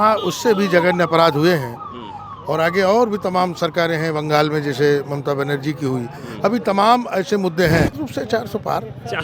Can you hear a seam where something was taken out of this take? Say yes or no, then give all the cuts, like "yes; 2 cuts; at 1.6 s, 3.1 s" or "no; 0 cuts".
yes; 1 cut; at 7.9 s